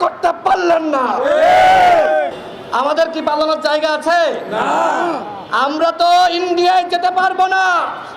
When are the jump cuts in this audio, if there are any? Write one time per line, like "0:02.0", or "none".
0:02.3